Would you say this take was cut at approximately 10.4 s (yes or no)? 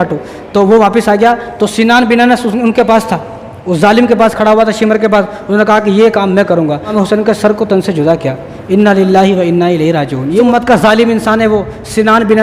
yes